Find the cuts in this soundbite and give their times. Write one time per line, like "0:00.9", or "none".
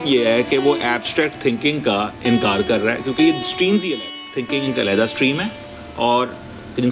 0:04.2